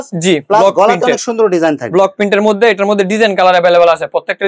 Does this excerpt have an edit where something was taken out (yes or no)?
no